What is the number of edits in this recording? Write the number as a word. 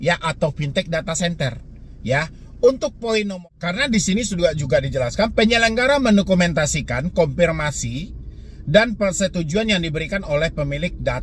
one